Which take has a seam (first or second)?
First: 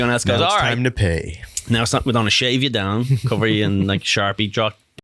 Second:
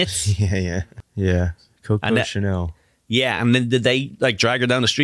second